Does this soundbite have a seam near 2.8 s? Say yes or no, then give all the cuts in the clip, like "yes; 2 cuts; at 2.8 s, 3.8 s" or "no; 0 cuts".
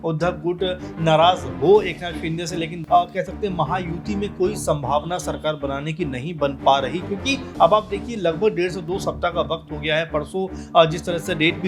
yes; 1 cut; at 2.8 s